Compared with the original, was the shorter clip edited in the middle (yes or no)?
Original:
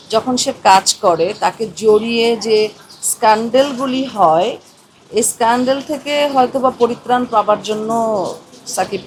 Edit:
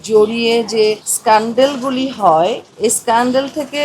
yes